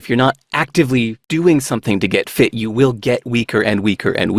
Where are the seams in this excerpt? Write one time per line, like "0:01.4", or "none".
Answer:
0:01.2